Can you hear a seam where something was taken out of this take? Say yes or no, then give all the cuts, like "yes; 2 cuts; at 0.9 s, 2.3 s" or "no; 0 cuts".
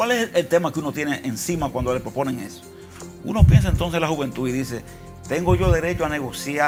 no; 0 cuts